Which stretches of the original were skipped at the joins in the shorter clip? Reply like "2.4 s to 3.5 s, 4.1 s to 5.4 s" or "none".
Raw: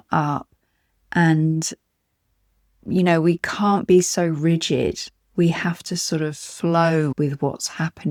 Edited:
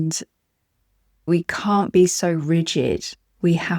2.8 s to 3.2 s